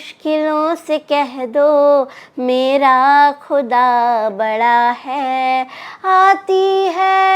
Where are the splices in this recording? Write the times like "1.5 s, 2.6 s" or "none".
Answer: none